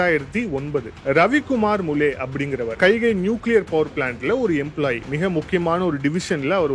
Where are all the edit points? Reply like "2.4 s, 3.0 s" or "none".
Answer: 0.9 s, 2.8 s